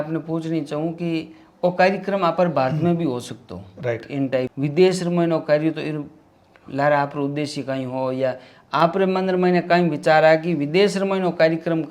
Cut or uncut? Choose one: cut